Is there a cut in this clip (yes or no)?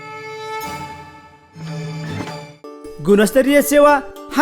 yes